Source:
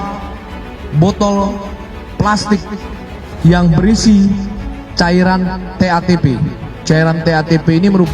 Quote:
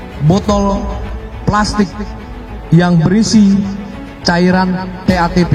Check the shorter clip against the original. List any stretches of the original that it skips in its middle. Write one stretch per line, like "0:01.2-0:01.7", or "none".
none